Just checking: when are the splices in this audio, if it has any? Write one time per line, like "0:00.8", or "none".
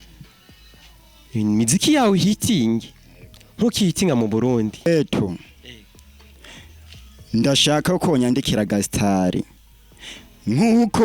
0:04.9